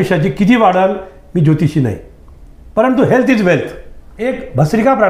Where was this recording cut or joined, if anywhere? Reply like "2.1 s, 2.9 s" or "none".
4.1 s